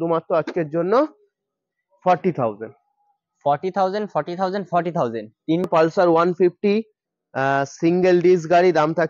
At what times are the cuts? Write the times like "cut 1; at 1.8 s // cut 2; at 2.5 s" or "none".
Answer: cut 1; at 5.7 s